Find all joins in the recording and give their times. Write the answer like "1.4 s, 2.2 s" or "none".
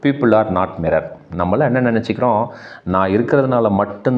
1.2 s